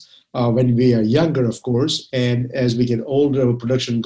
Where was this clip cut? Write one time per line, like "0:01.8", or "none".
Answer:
none